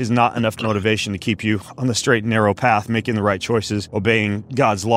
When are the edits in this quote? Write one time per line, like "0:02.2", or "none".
0:03.8